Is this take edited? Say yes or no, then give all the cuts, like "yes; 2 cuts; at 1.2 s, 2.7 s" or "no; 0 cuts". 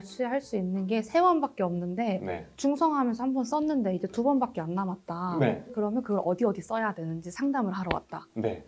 no; 0 cuts